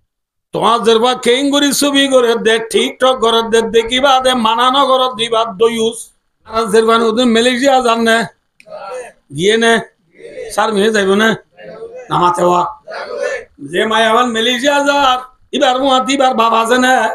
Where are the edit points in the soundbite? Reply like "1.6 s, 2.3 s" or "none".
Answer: 6.5 s

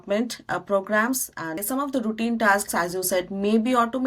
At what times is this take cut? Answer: 1.6 s

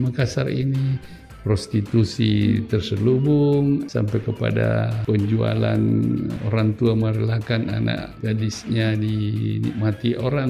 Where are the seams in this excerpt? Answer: 3.9 s, 4.9 s, 6.4 s, 8.1 s

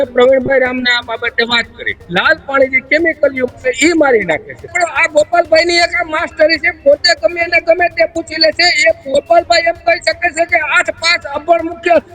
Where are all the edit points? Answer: 2.0 s, 4.7 s

